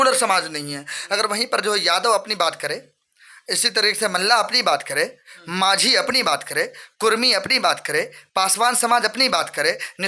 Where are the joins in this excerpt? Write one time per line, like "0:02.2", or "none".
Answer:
none